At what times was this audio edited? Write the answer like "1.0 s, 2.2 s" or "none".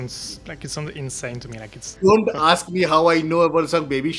2.0 s